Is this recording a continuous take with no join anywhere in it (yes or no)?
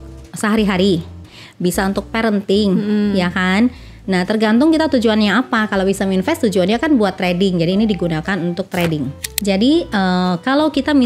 no